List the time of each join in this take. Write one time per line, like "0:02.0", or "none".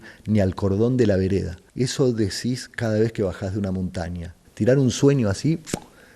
0:01.6
0:04.4